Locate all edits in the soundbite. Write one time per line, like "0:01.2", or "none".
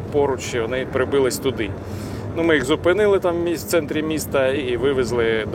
0:04.6